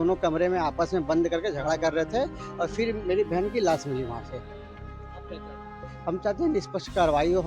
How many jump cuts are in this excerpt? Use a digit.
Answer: 0